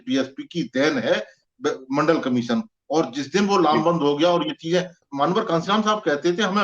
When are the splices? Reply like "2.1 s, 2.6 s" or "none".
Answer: 5.0 s